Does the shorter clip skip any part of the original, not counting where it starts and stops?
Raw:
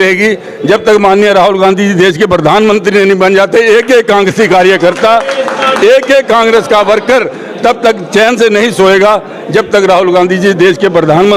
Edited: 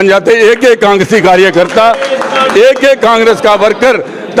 no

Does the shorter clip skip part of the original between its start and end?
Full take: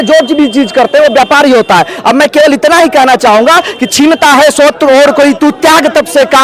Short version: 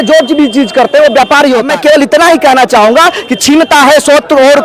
yes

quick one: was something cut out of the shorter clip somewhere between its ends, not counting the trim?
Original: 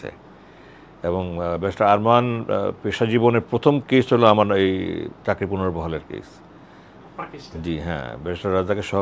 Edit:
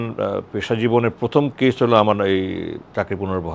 no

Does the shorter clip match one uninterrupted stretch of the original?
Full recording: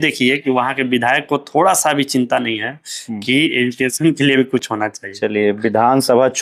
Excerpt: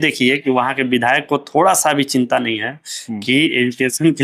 yes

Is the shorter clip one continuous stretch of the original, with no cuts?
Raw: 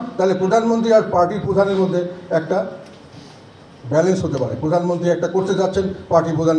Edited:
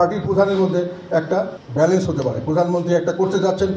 no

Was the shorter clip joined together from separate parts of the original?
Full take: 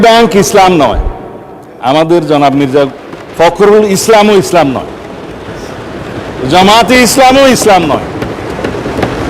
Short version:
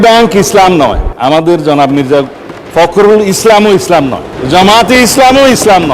yes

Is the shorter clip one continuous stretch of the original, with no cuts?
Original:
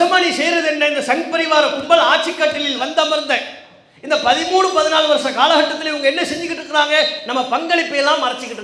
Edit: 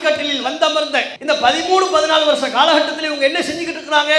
no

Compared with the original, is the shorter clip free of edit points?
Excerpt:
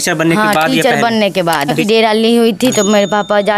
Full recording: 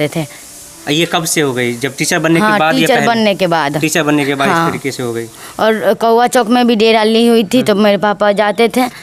no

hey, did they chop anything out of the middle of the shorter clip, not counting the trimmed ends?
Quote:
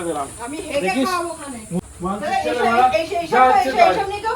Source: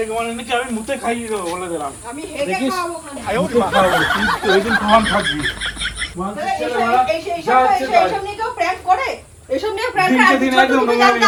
yes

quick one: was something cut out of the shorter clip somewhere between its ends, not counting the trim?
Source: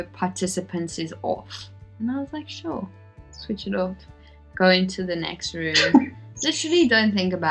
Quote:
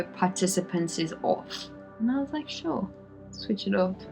no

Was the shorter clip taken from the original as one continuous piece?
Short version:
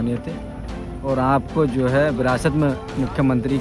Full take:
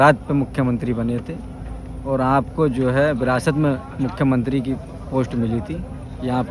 yes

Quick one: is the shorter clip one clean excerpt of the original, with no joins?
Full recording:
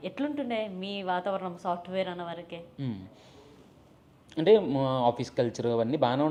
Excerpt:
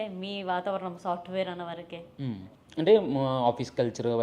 no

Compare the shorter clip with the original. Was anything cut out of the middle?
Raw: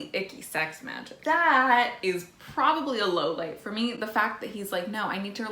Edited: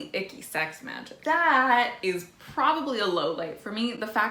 no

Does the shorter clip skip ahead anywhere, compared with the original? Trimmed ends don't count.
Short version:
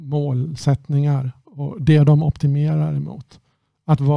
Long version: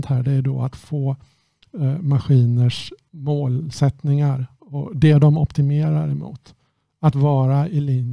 no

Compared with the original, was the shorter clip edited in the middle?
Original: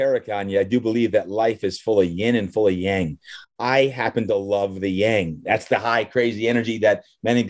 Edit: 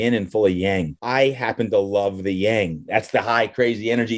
yes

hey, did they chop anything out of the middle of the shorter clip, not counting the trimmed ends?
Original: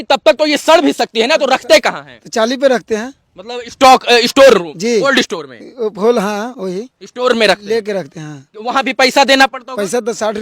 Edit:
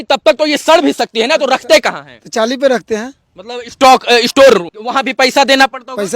yes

